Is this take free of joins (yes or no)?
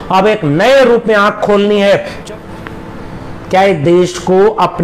no